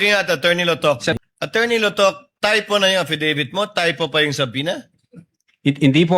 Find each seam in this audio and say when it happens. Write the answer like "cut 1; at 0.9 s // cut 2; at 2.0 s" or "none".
cut 1; at 1.2 s